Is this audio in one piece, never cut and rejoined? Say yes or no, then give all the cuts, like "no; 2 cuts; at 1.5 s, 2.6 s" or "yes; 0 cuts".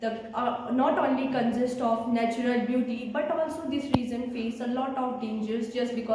yes; 0 cuts